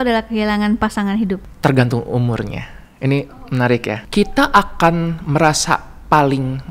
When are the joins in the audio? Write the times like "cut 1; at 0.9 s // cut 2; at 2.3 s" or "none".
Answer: cut 1; at 4.0 s